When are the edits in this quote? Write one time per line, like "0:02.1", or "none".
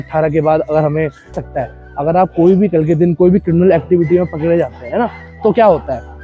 0:01.4